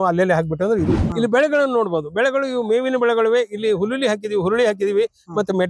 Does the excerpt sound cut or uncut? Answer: cut